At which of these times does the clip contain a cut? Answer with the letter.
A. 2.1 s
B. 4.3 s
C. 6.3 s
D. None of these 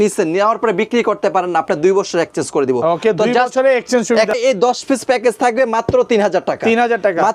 B